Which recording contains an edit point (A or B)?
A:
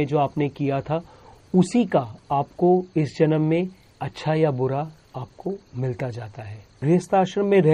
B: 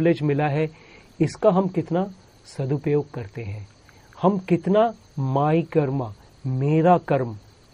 A